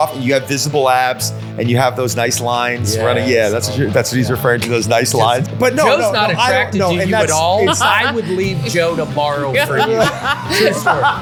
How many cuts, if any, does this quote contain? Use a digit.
0